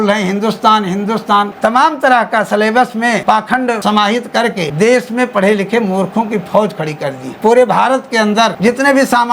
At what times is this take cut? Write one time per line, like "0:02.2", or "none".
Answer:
0:01.5
0:03.6
0:04.7
0:07.2
0:08.6